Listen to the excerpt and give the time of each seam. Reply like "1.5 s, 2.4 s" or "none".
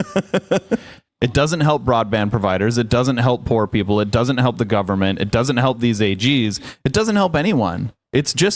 1.0 s